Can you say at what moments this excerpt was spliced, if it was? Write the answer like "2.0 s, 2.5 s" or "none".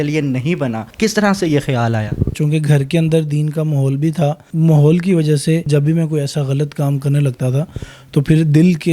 0.9 s, 2.4 s, 4.4 s, 5.7 s

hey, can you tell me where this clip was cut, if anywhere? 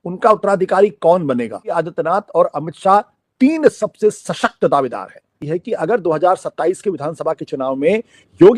1.7 s

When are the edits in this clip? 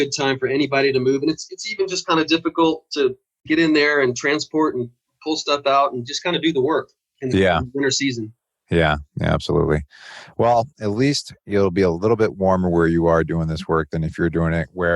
3.3 s

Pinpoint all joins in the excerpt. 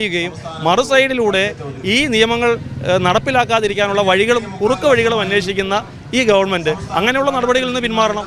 none

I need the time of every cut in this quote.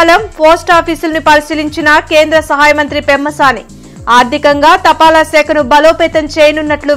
none

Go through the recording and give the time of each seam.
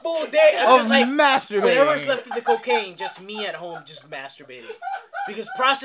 none

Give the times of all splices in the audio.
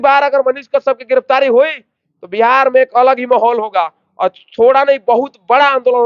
none

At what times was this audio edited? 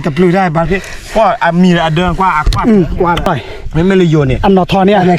3.4 s

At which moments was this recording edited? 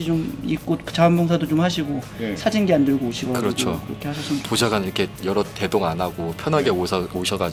none

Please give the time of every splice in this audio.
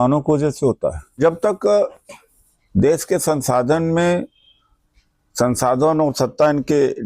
1.2 s

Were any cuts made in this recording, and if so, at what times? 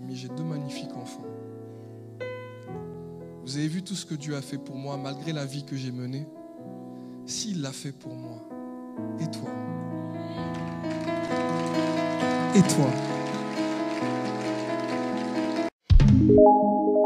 15.7 s

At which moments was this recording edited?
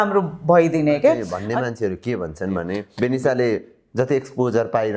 1.4 s, 2.9 s

